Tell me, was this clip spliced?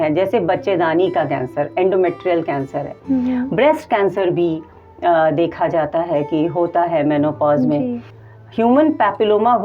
yes; 1 cut; at 8.1 s

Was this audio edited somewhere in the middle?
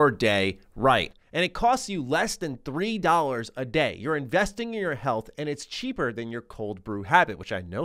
yes; 1 cut; at 1.1 s

